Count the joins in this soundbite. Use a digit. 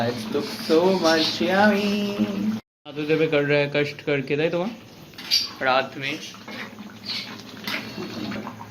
0